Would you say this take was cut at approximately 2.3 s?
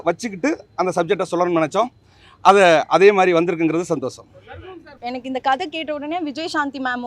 no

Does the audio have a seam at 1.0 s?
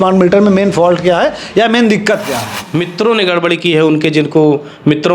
no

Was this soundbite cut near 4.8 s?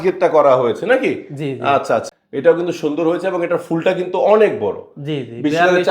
no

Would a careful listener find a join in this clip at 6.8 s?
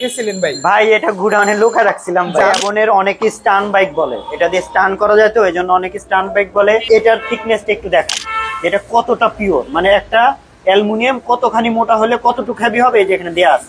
yes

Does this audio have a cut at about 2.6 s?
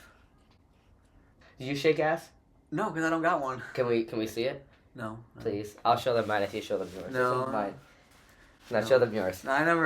no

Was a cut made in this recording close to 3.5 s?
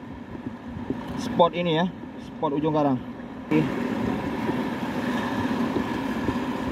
yes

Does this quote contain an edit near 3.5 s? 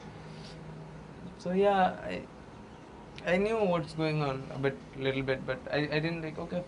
no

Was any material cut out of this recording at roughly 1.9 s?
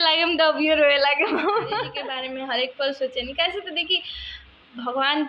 yes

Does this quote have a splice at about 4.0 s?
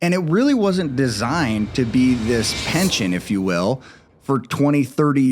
yes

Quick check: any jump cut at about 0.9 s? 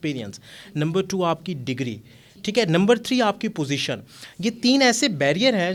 no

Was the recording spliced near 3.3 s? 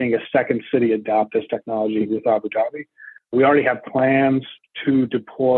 yes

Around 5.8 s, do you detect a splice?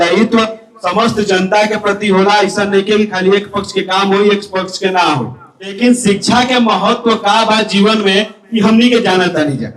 yes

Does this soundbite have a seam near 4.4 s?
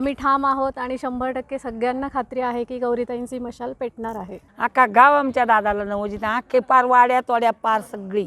yes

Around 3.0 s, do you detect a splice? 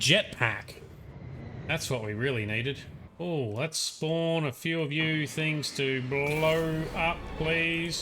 yes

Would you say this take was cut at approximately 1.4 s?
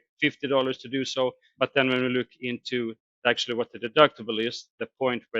yes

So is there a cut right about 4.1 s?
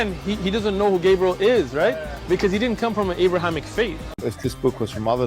yes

